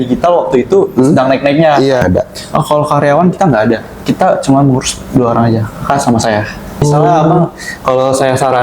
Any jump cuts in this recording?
yes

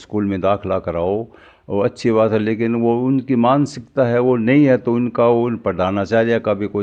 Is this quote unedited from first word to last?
yes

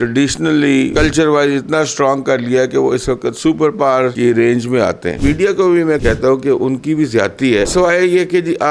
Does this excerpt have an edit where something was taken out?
yes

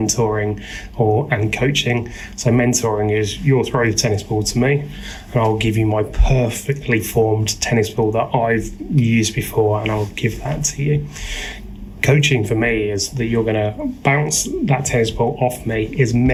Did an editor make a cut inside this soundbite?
no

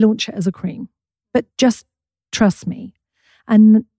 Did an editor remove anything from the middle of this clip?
yes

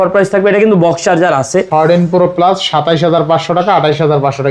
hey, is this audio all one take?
no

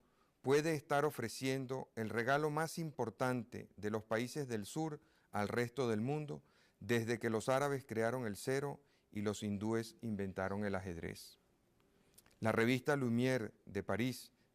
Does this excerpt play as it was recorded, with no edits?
no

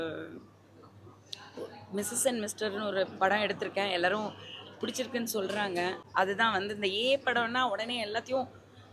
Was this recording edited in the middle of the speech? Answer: yes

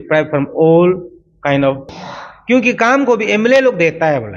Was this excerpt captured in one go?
no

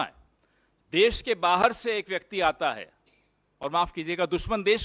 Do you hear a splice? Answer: no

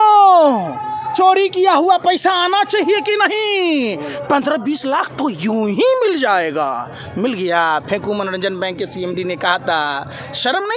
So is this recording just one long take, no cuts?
yes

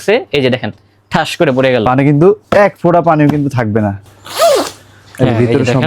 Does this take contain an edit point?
yes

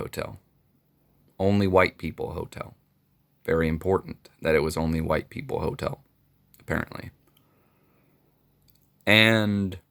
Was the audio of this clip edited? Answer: no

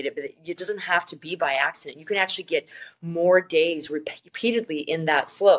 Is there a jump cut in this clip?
no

